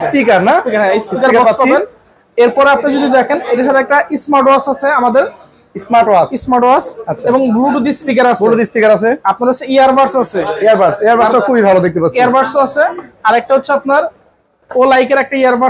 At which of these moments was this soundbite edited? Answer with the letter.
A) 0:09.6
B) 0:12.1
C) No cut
C